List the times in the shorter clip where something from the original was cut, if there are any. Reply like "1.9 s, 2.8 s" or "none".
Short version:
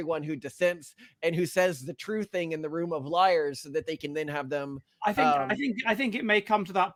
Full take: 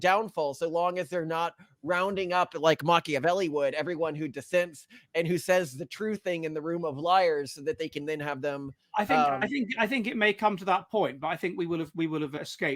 none